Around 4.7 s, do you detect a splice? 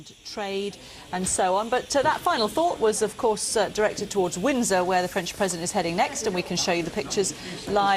no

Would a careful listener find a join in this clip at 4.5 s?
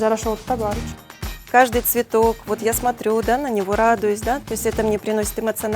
no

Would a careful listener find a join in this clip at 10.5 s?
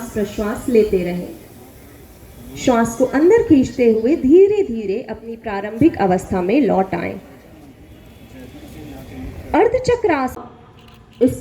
yes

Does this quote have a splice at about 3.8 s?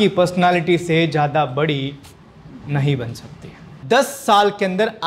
yes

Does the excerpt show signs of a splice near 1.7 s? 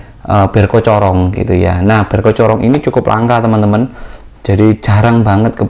no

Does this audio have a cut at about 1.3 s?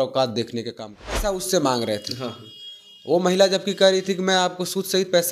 yes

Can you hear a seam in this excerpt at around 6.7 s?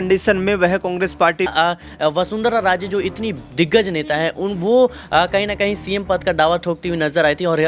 no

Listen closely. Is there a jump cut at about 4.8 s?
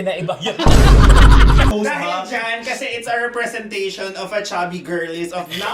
no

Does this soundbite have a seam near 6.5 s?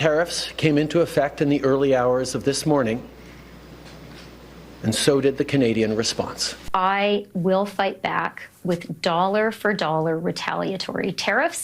yes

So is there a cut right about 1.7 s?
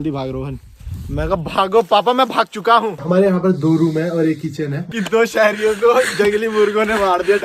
no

